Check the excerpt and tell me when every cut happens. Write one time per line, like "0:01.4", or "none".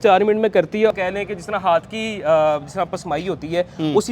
0:00.9